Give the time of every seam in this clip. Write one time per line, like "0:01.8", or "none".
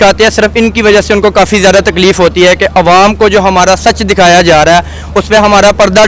none